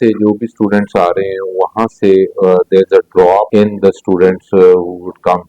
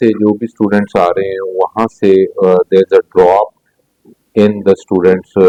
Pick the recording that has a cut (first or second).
first